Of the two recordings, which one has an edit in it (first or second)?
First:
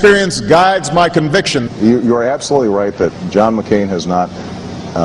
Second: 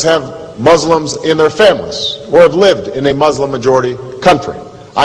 first